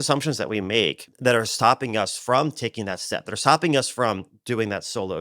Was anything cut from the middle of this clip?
yes; 1 cut; at 1.1 s

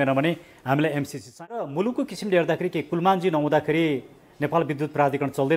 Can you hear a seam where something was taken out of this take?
yes; 1 cut; at 1.7 s

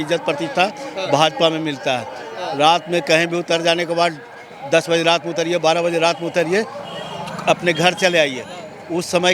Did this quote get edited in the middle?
no; 0 cuts

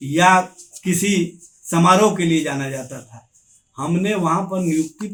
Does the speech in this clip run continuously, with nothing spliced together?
yes; 0 cuts

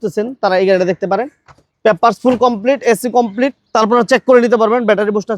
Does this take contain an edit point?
no; 0 cuts

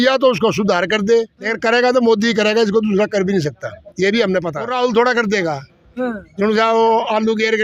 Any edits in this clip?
yes; 2 cuts; at 1.4 s, 4.7 s

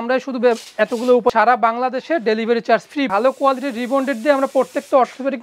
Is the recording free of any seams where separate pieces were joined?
no; 2 cuts; at 1.3 s, 3.1 s

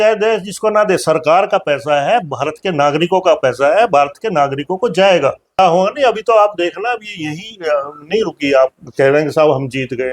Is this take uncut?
no; 1 cut; at 5.6 s

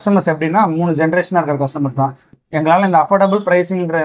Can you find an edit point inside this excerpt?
no; 0 cuts

